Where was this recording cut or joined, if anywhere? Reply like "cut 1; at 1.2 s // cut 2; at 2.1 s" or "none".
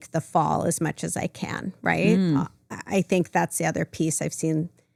none